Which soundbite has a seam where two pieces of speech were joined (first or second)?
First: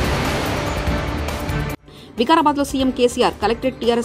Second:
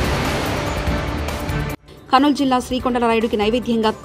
second